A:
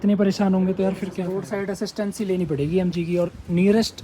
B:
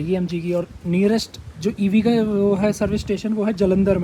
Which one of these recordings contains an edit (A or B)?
A